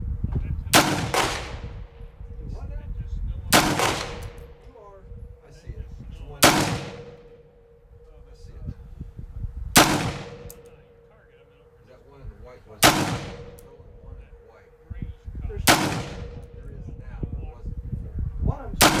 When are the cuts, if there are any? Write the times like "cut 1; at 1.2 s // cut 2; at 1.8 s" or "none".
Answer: none